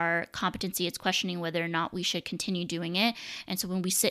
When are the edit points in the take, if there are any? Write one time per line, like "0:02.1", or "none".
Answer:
none